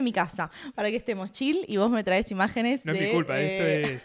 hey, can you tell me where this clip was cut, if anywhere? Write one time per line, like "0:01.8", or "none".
none

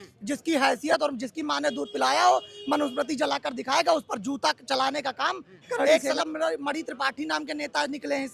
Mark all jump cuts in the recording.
0:05.9

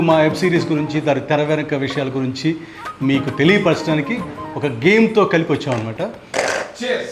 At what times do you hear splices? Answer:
0:06.2

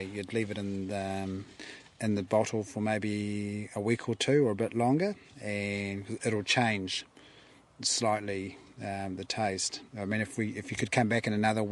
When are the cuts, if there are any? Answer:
none

